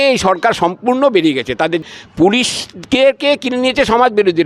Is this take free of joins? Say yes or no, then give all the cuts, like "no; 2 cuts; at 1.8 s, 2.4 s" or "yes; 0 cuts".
no; 1 cut; at 1.8 s